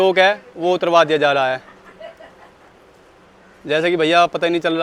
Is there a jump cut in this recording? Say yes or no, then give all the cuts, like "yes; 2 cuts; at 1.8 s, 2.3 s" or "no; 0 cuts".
no; 0 cuts